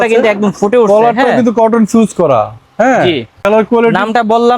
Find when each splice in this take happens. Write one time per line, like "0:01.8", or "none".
0:03.4